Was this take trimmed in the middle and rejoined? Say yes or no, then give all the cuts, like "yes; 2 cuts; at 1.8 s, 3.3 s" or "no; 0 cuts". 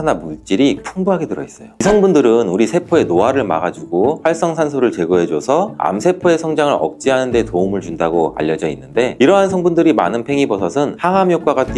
yes; 1 cut; at 1.8 s